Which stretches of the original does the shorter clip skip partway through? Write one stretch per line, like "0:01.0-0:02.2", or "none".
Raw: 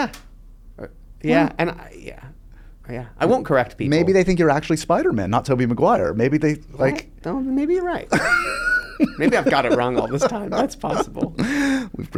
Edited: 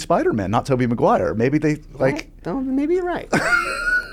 none